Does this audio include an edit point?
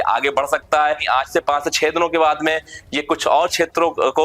yes; 1 cut; at 1.0 s

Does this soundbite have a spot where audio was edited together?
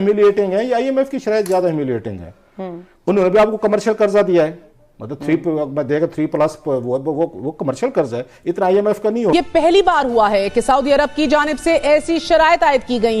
yes; 1 cut; at 9.3 s

